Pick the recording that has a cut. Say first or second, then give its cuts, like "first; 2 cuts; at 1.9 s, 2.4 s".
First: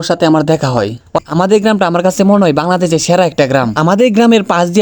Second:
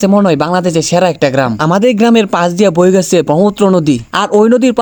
first; 1 cut; at 1.1 s